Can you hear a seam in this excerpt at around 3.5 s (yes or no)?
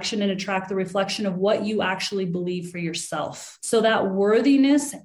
yes